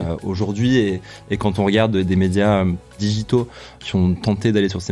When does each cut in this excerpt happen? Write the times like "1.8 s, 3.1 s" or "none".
2.9 s